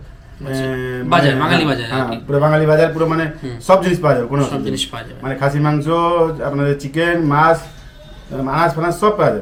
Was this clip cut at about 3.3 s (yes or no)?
no